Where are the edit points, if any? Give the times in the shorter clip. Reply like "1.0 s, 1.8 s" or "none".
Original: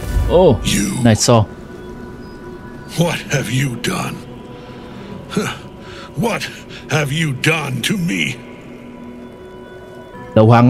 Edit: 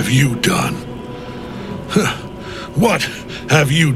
none